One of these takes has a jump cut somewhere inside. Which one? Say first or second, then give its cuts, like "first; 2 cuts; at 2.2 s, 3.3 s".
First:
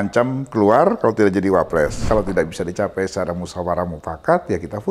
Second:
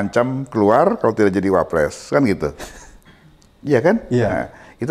first; 1 cut; at 2.0 s